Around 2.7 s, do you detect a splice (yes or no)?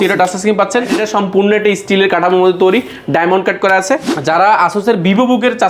no